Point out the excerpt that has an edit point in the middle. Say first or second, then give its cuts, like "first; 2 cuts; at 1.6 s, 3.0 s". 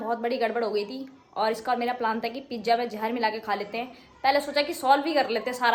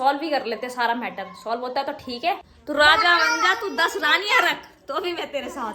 second; 1 cut; at 2.5 s